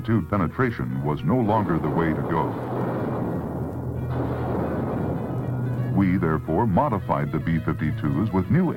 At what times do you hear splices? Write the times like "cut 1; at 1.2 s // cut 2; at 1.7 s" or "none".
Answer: cut 1; at 3.2 s